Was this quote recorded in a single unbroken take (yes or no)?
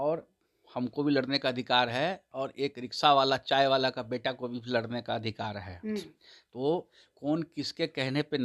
yes